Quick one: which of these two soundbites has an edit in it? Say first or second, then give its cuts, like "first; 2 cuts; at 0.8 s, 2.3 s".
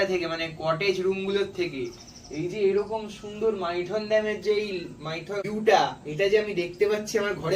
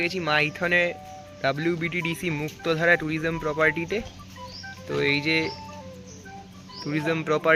first; 1 cut; at 5.4 s